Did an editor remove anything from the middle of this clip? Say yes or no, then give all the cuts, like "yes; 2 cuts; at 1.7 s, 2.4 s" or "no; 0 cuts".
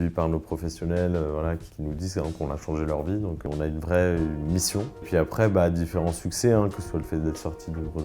yes; 3 cuts; at 1.7 s, 3.4 s, 5.0 s